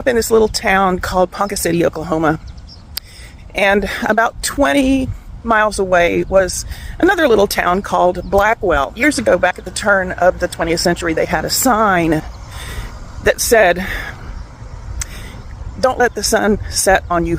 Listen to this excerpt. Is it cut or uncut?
uncut